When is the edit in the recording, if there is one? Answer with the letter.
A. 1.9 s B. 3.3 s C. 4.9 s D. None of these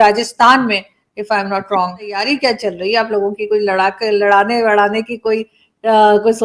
D